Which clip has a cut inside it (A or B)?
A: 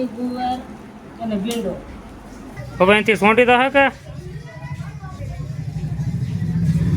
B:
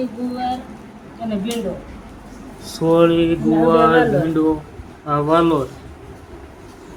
A